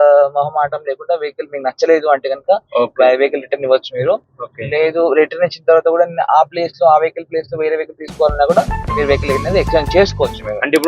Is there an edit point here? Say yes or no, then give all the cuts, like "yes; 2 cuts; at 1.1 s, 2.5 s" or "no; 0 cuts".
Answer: no; 0 cuts